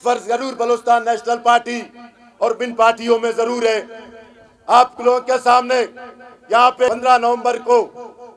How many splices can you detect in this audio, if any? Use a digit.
1